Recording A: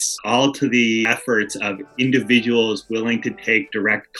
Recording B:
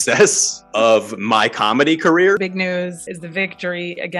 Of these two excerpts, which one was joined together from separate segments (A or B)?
B